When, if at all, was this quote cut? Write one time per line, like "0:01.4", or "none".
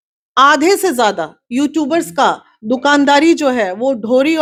none